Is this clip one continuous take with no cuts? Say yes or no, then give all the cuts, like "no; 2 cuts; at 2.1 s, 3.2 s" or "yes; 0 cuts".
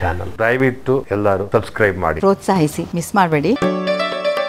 no; 2 cuts; at 2.2 s, 3.6 s